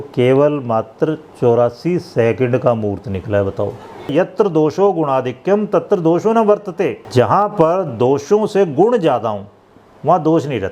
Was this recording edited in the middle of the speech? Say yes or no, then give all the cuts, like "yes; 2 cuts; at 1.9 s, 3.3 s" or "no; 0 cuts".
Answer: yes; 2 cuts; at 4.1 s, 7.0 s